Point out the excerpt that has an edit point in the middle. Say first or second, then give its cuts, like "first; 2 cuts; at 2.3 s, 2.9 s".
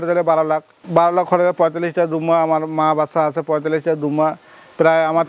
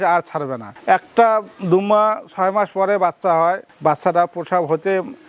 second; 1 cut; at 3.7 s